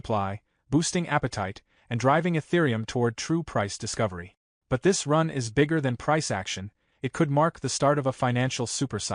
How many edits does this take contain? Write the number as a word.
zero